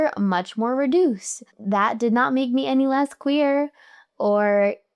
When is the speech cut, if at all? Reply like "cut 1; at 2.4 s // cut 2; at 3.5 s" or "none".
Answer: none

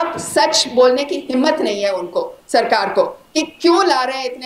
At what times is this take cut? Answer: none

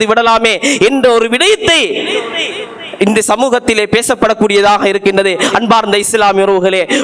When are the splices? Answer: none

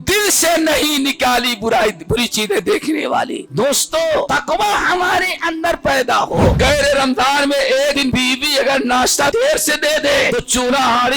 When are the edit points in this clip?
cut 1; at 3.4 s // cut 2; at 4.3 s // cut 3; at 6.6 s // cut 4; at 8.0 s // cut 5; at 9.3 s // cut 6; at 10.3 s

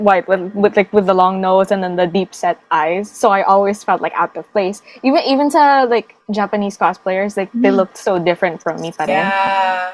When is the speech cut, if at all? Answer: none

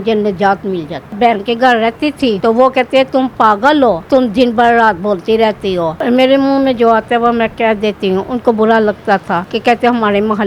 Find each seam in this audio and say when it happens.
cut 1; at 1.2 s // cut 2; at 2.4 s // cut 3; at 4.0 s // cut 4; at 6.0 s // cut 5; at 9.5 s

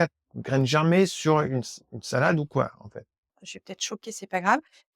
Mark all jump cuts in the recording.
cut 1; at 3.4 s

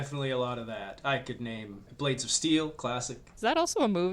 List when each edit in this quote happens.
cut 1; at 1.8 s // cut 2; at 3.2 s

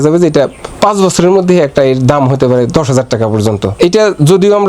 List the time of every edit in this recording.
cut 1; at 3.7 s

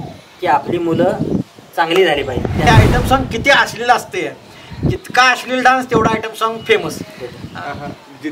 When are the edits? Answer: cut 1; at 2.6 s

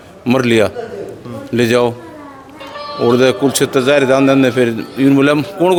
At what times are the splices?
none

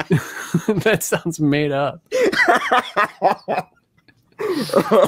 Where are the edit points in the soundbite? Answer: none

